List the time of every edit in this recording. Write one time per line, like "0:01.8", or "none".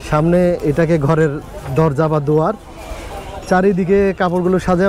none